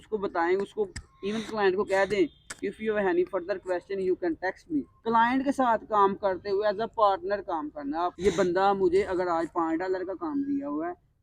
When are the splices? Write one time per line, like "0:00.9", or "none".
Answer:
0:04.9
0:08.2